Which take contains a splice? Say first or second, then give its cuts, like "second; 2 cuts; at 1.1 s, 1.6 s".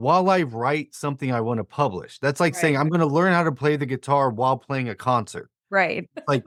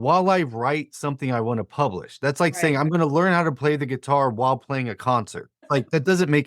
second; 1 cut; at 5.5 s